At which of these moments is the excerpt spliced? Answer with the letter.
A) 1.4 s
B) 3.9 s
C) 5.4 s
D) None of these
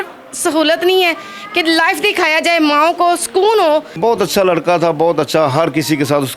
B